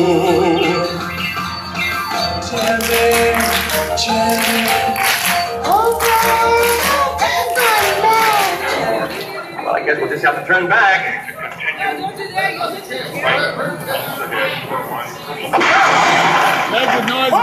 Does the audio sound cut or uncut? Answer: cut